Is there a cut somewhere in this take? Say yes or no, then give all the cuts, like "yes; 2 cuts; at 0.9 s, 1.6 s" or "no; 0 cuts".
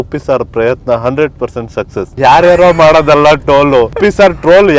yes; 2 cuts; at 2.1 s, 4.0 s